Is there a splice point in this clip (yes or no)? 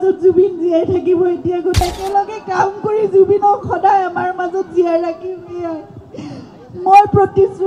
yes